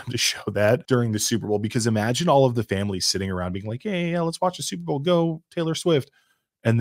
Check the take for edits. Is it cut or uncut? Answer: uncut